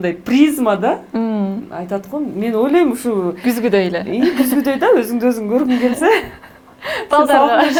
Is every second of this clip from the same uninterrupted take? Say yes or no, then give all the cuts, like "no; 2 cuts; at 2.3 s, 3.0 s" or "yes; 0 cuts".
yes; 0 cuts